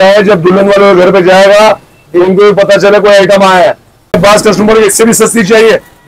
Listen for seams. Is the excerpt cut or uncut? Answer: cut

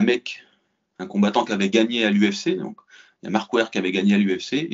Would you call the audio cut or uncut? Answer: uncut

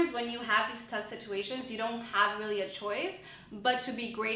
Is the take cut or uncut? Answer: uncut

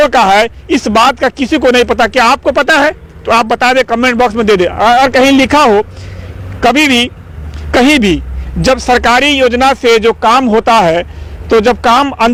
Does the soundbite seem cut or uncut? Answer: uncut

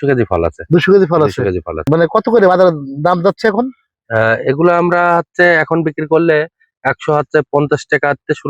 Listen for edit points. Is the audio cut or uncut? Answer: cut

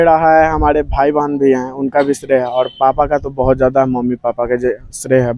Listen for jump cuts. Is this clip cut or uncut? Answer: uncut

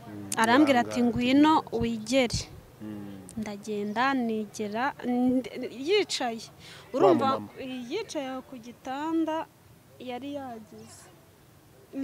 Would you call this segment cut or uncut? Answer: uncut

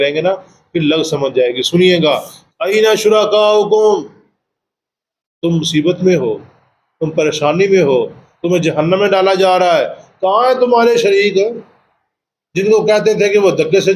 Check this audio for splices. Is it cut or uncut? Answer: cut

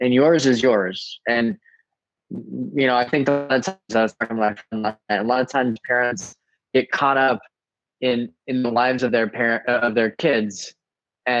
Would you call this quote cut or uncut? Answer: uncut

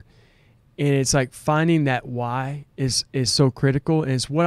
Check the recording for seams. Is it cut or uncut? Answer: uncut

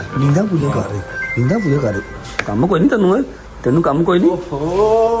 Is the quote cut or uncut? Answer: uncut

